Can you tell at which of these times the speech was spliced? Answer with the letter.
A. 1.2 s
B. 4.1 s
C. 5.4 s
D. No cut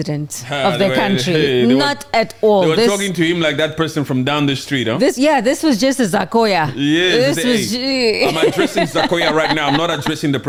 D